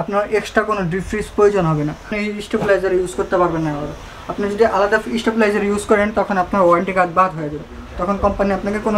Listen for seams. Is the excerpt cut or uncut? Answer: cut